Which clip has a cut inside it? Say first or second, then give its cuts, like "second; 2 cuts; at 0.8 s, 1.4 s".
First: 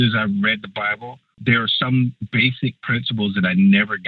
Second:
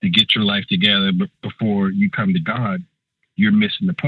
first; 2 cuts; at 1.4 s, 2.2 s